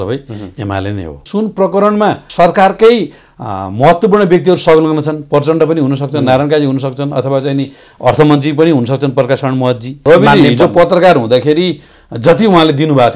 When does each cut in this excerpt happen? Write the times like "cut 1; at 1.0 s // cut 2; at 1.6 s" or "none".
cut 1; at 1.2 s // cut 2; at 2.2 s // cut 3; at 10.0 s